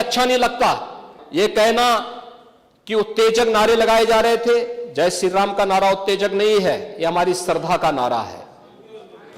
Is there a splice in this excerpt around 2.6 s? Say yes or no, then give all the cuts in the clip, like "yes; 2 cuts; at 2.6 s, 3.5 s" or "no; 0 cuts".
no; 1 cut; at 1.2 s